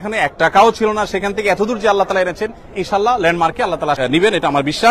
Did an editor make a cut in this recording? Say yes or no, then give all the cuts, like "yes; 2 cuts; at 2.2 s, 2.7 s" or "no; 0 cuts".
yes; 1 cut; at 4.0 s